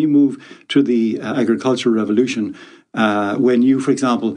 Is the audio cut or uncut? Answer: cut